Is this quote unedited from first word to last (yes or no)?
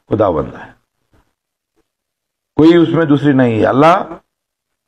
yes